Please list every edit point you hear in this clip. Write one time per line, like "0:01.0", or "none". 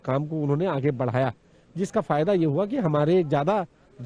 none